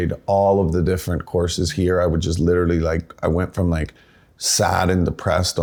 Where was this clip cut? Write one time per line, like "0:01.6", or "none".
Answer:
none

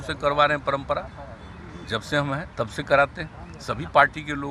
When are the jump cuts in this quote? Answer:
none

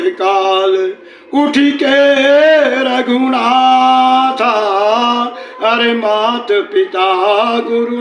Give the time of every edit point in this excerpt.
none

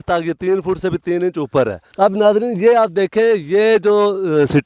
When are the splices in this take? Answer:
0:01.8

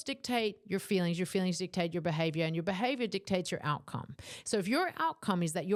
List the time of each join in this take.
none

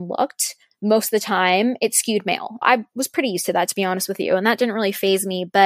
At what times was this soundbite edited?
0:02.6

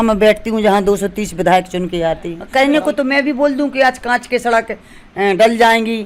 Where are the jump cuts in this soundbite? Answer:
0:02.3

